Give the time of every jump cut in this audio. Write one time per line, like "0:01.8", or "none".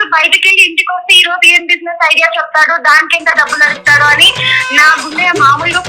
none